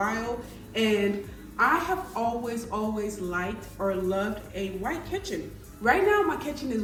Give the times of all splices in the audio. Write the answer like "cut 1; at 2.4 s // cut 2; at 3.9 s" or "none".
none